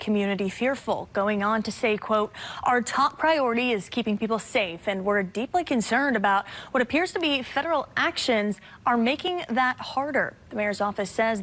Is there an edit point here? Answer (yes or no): no